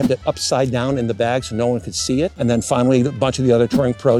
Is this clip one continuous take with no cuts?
no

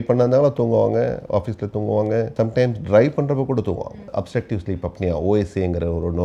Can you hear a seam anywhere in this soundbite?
yes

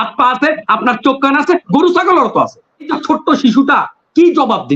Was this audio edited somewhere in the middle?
yes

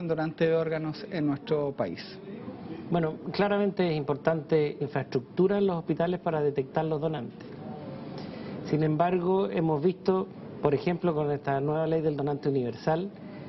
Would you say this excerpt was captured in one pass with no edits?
yes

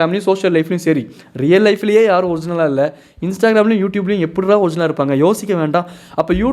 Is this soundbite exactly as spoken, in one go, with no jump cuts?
yes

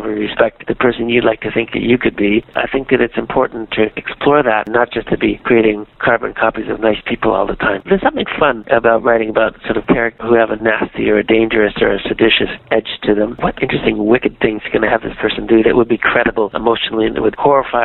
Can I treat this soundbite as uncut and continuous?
no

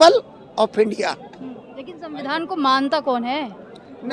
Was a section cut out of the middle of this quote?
no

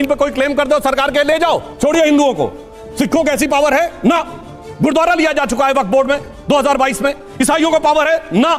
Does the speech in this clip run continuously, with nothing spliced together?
no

